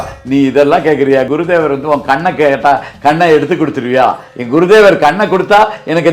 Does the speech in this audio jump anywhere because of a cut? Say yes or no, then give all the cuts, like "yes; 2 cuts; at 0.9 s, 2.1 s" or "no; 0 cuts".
yes; 2 cuts; at 1.3 s, 4.3 s